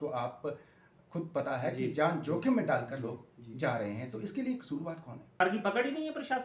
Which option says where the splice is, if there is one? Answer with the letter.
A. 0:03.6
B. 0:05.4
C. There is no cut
B